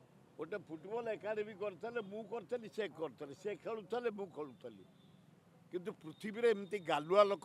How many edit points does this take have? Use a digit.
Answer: 0